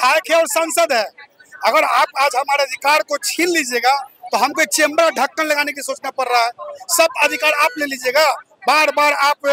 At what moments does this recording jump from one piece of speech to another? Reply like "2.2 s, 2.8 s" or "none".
none